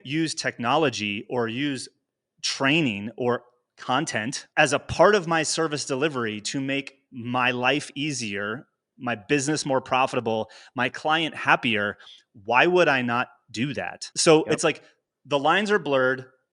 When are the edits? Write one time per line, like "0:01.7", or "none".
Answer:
0:04.5